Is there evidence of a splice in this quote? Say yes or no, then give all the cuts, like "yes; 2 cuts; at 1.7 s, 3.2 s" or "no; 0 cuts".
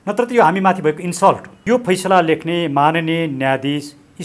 yes; 1 cut; at 1.5 s